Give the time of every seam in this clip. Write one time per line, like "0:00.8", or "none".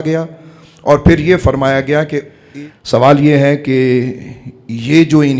0:02.4